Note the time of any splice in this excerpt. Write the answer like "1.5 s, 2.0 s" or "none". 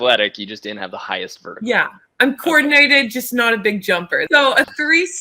4.2 s